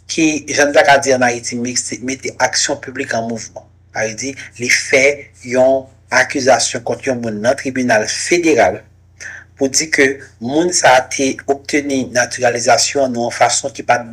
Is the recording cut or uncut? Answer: uncut